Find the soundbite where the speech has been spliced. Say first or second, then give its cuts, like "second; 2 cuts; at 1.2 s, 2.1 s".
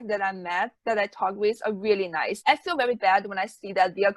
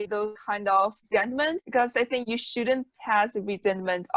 first; 1 cut; at 2.4 s